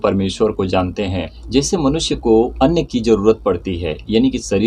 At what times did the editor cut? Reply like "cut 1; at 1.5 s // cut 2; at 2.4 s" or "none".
cut 1; at 1.3 s // cut 2; at 2.5 s